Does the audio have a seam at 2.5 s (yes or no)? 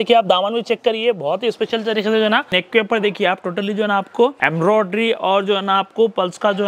yes